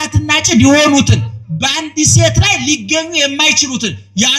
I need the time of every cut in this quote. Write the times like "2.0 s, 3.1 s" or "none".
none